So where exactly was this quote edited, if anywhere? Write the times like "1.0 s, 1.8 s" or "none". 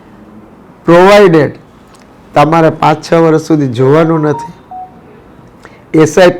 none